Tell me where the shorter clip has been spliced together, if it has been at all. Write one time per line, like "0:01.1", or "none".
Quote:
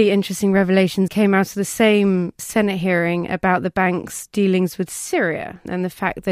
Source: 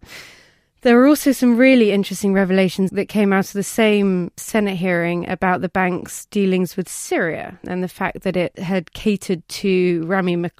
0:01.1

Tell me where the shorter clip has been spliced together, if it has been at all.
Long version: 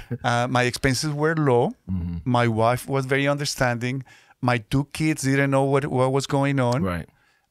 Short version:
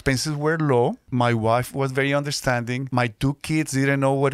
0:01.0
0:02.8

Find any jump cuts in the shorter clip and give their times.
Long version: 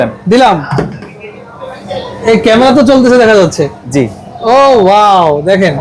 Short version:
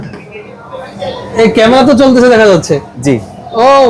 none

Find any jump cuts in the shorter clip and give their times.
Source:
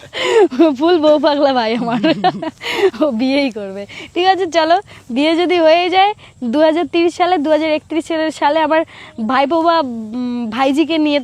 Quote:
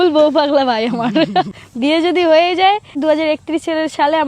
0:01.6
0:03.0

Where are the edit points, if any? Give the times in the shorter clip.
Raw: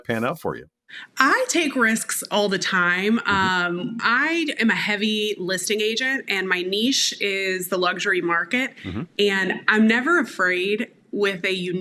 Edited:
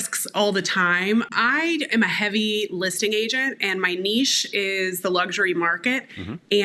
0:01.3

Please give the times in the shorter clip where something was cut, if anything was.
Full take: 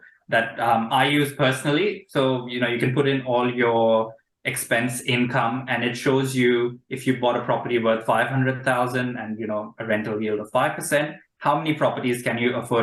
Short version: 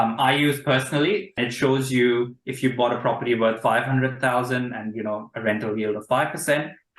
0:01.3

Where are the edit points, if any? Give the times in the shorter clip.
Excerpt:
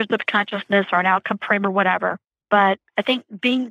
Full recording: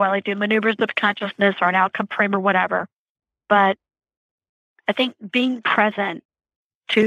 0:02.3
0:02.9

